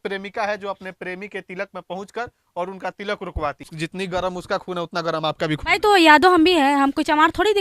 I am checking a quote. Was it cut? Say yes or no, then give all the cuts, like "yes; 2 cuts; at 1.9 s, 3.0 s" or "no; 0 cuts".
yes; 1 cut; at 3.7 s